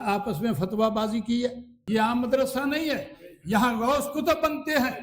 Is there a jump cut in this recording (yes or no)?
yes